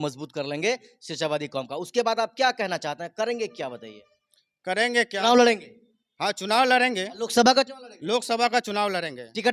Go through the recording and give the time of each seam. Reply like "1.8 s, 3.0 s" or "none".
none